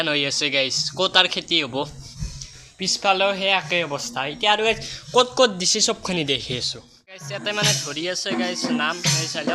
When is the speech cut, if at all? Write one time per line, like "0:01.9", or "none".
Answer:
0:07.3